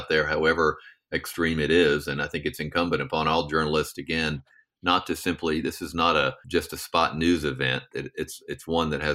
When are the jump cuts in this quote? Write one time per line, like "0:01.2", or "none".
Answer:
0:06.4